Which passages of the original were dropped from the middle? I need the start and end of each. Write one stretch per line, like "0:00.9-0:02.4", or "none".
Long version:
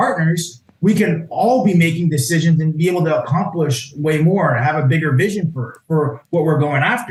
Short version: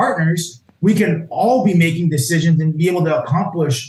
none